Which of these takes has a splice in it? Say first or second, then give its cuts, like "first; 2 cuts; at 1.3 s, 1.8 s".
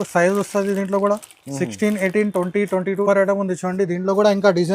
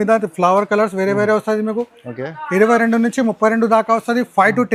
first; 1 cut; at 3.0 s